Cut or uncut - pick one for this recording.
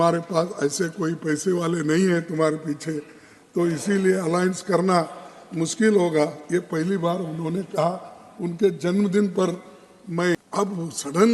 cut